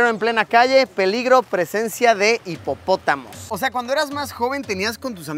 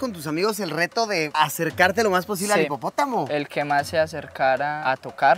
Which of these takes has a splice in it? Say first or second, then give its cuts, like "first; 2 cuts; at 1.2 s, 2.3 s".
first; 1 cut; at 3.4 s